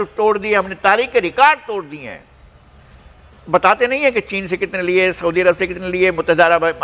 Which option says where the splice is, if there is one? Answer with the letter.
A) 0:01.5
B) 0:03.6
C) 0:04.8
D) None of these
D